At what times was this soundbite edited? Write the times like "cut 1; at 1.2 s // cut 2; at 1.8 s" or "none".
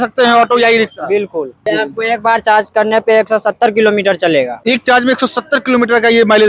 cut 1; at 1.7 s // cut 2; at 4.6 s